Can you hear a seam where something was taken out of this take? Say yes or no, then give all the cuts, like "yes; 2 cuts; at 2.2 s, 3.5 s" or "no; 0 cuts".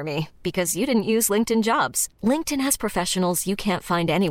no; 0 cuts